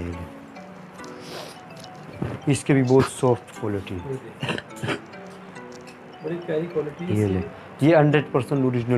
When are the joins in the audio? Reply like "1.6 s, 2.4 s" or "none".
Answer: none